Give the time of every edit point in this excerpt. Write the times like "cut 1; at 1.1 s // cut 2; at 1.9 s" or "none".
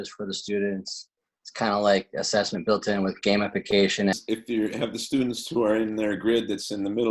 cut 1; at 4.1 s